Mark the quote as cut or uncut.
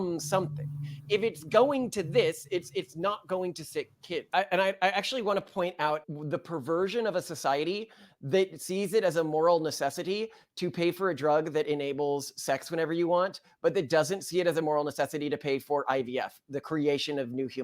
cut